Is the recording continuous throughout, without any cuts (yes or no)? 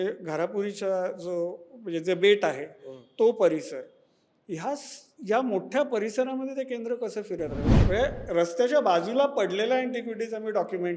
no